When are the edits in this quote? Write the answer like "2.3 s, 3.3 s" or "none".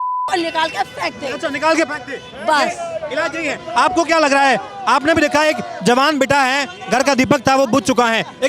none